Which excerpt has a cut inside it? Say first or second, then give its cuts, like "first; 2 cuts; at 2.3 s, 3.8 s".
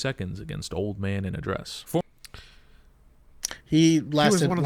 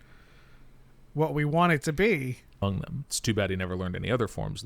second; 1 cut; at 2.6 s